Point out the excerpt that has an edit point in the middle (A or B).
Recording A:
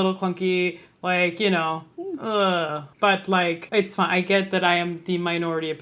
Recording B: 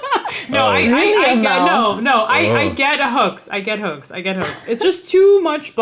A